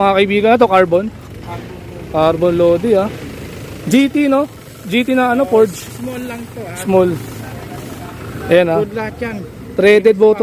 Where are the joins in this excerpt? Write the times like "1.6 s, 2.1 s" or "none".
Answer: none